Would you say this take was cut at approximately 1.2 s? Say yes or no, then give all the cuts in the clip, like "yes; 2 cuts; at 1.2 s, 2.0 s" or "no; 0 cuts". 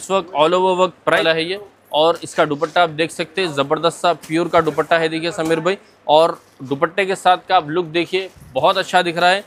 yes; 1 cut; at 1.2 s